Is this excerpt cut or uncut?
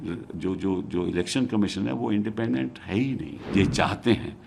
cut